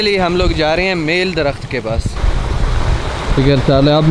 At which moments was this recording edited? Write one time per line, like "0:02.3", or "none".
none